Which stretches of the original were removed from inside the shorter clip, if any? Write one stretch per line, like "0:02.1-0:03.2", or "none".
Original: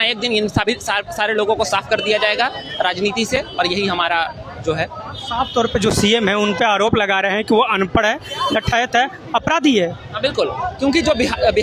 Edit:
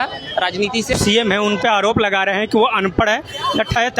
0:03.4-0:05.9